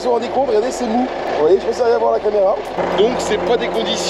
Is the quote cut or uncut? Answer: uncut